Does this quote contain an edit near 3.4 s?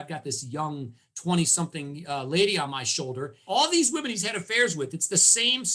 yes; 1 cut; at 3.4 s

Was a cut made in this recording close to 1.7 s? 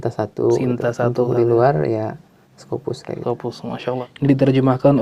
no; 1 cut; at 4.0 s

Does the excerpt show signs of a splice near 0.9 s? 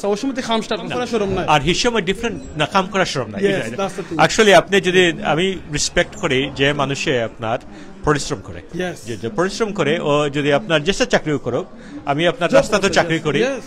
yes; 1 cut; at 0.9 s

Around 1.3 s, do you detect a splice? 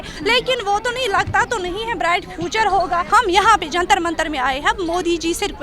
no; 1 cut; at 3.1 s

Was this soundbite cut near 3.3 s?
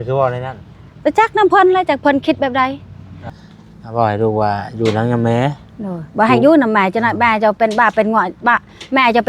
yes; 1 cut; at 3.3 s

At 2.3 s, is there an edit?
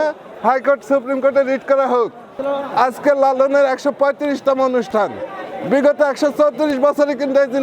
yes; 1 cut; at 2.3 s

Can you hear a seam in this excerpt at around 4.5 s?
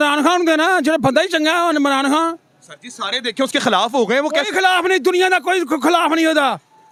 no; 0 cuts

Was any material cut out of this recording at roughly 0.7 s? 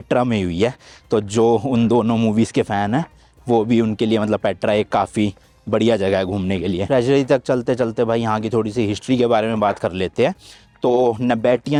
no; 0 cuts

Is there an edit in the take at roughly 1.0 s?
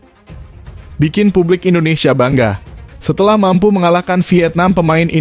yes; 1 cut; at 1.0 s

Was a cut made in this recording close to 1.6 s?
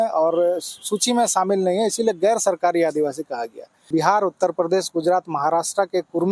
no; 1 cut; at 3.9 s

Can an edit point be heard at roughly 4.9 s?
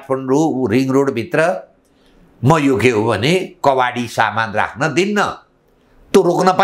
no; 0 cuts

